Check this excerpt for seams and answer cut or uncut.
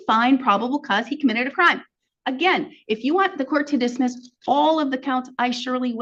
uncut